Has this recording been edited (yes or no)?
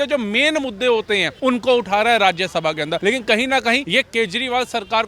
yes